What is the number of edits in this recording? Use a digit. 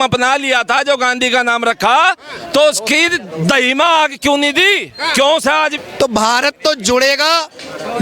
1